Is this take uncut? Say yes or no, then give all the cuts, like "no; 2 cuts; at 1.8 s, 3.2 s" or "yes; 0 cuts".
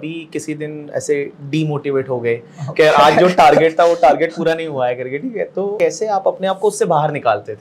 no; 1 cut; at 5.7 s